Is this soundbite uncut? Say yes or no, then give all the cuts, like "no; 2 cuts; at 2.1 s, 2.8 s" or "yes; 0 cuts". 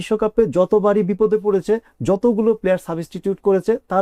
yes; 0 cuts